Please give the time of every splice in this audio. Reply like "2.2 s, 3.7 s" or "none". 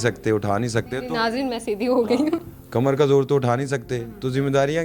none